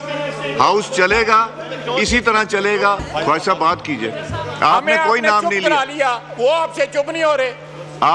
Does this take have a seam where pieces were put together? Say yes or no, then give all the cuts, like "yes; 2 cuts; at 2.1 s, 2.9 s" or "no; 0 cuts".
no; 0 cuts